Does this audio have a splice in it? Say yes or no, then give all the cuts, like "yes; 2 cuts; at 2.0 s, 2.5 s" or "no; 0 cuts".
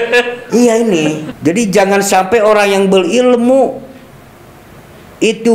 yes; 1 cut; at 1.3 s